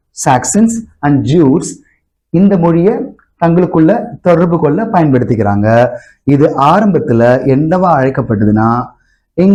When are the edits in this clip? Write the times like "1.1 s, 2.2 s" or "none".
none